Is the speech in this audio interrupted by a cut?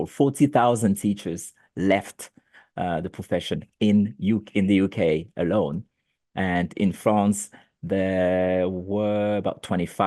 no; 0 cuts

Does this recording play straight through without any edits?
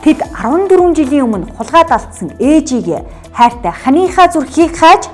yes; 0 cuts

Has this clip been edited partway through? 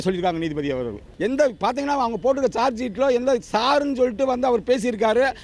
yes; 1 cut; at 1.1 s

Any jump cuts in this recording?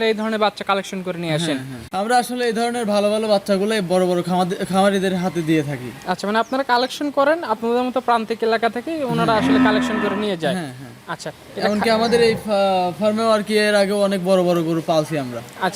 yes; 1 cut; at 1.8 s

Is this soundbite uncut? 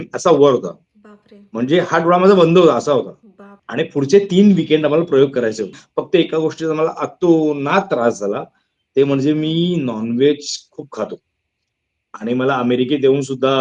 no; 1 cut; at 5.8 s

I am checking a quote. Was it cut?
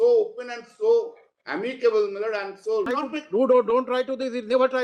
yes; 1 cut; at 2.9 s

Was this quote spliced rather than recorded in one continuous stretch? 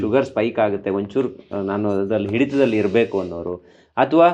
no; 0 cuts

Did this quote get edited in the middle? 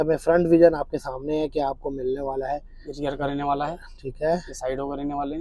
no; 0 cuts

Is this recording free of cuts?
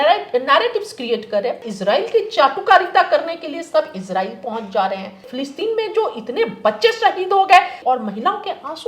no; 3 cuts; at 1.6 s, 5.3 s, 7.8 s

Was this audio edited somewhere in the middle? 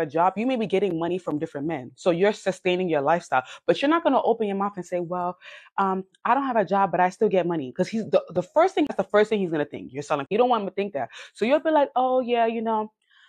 yes; 2 cuts; at 8.9 s, 10.3 s

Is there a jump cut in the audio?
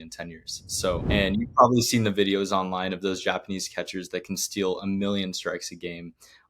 yes; 1 cut; at 1.2 s

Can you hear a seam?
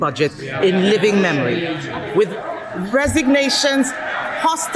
no; 0 cuts

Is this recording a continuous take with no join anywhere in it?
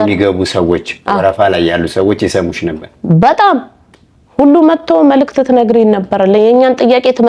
yes; 0 cuts

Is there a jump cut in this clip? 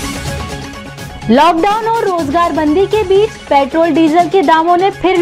yes; 1 cut; at 1.0 s

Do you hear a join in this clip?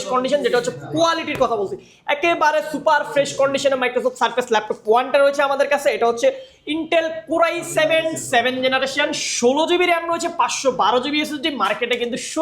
no; 0 cuts

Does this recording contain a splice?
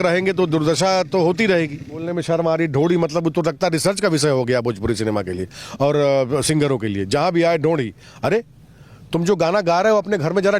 yes; 1 cut; at 2.1 s

